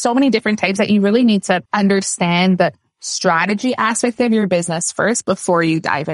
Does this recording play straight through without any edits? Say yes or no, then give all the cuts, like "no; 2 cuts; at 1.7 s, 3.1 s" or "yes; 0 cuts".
yes; 0 cuts